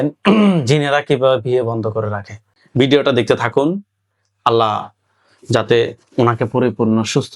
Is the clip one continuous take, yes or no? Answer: yes